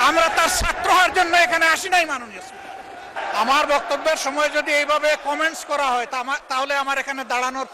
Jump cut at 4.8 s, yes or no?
no